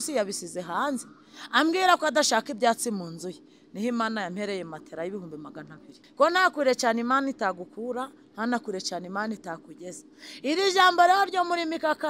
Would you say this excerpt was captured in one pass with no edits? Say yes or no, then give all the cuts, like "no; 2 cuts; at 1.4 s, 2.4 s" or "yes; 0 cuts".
no; 1 cut; at 6.0 s